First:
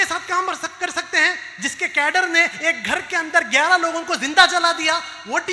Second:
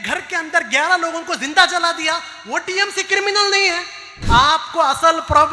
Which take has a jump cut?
second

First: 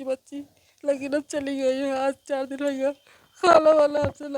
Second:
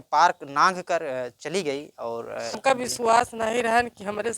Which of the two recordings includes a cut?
second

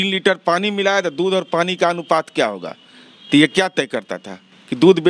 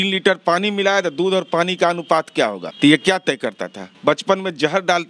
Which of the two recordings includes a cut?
second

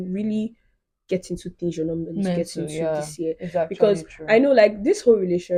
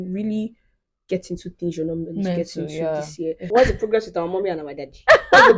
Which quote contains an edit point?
second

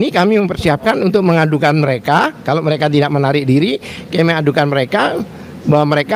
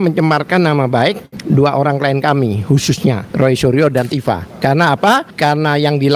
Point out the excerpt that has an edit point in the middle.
second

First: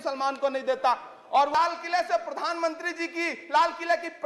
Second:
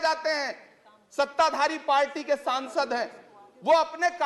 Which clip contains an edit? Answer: first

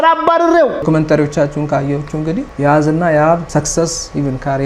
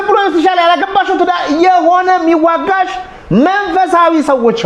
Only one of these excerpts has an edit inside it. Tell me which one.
first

